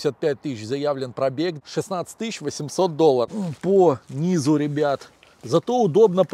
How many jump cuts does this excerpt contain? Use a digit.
2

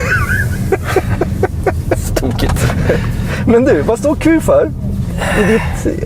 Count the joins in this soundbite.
0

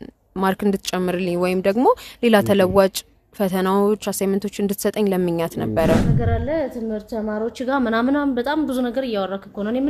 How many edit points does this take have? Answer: 1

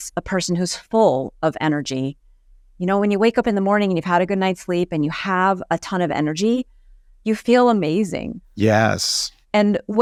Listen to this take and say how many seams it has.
0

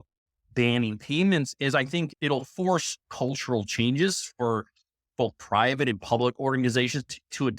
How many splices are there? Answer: 1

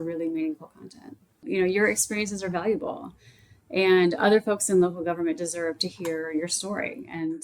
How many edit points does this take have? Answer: 1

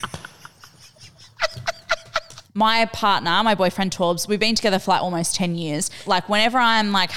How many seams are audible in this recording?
2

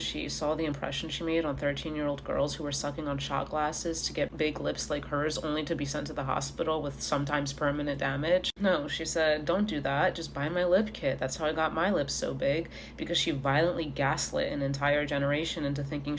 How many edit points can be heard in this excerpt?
0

